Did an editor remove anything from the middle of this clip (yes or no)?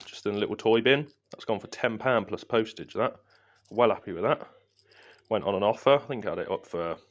no